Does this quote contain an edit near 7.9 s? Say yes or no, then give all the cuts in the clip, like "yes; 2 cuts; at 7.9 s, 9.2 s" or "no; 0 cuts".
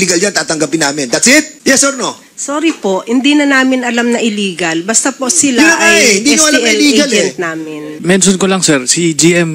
yes; 2 cuts; at 1.5 s, 7.9 s